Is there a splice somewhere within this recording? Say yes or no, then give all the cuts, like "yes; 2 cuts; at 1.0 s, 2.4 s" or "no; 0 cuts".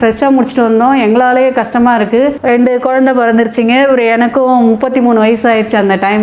no; 0 cuts